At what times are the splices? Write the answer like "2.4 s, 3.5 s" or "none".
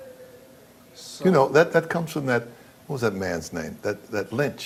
none